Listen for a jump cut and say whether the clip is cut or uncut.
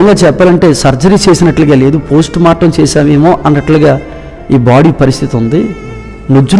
uncut